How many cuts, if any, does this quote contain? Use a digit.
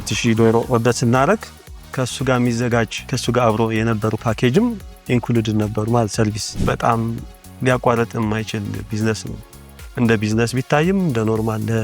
2